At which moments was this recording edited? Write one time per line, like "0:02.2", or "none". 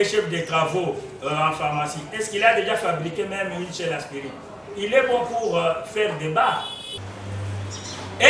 0:06.9